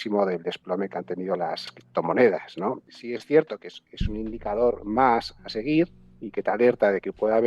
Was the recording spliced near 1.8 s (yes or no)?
yes